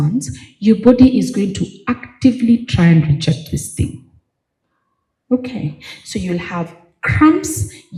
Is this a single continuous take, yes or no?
yes